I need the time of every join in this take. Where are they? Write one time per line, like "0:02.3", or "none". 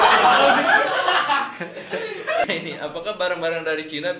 0:02.4